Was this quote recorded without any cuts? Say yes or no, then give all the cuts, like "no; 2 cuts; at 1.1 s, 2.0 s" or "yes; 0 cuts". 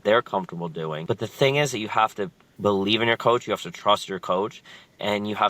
no; 2 cuts; at 1.0 s, 2.4 s